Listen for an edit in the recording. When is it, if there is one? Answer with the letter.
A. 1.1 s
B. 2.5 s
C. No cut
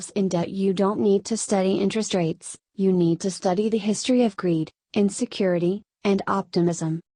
C